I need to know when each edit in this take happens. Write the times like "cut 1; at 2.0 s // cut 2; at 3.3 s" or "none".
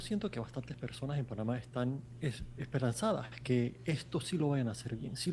cut 1; at 2.1 s